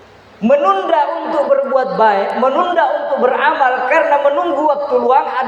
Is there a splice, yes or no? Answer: no